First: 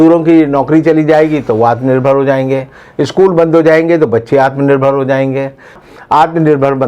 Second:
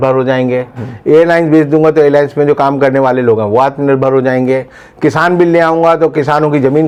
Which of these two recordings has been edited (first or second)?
first